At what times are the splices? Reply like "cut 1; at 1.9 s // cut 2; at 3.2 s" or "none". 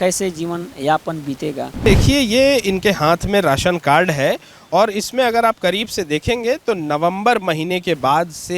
cut 1; at 1.9 s